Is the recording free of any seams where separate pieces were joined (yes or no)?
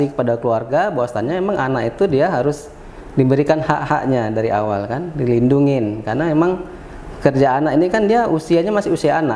yes